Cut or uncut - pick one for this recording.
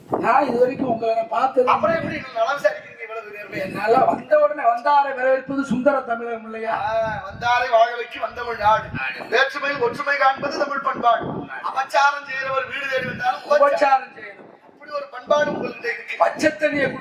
uncut